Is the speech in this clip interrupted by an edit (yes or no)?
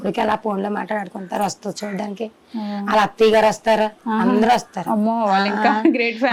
no